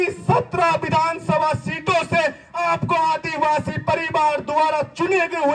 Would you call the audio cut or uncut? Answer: uncut